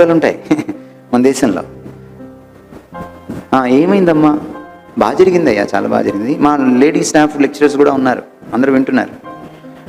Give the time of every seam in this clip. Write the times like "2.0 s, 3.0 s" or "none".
none